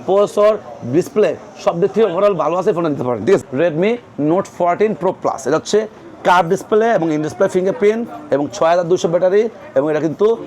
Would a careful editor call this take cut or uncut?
cut